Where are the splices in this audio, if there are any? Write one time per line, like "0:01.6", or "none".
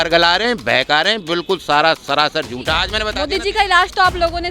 0:03.0